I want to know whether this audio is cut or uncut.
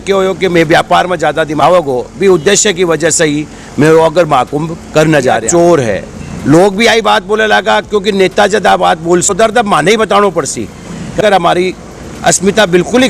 cut